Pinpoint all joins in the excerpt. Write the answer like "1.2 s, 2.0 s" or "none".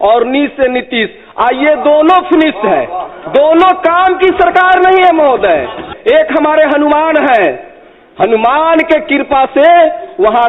5.9 s